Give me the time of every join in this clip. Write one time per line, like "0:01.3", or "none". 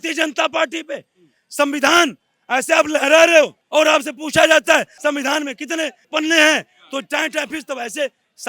0:03.6
0:04.9
0:06.0